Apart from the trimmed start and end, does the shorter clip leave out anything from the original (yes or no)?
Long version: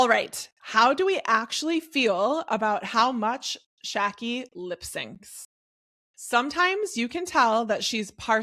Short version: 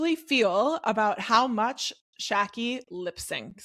no